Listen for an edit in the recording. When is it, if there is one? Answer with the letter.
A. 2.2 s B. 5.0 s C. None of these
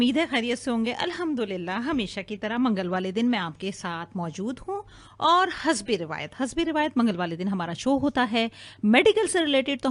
A